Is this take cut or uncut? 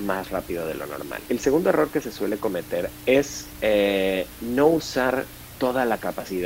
cut